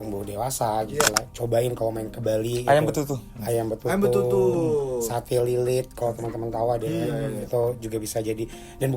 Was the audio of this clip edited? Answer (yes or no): yes